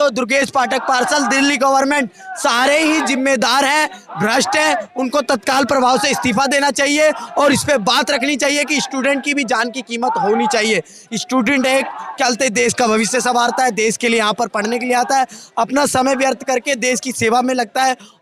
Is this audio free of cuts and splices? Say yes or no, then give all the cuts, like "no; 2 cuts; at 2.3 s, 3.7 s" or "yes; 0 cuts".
yes; 0 cuts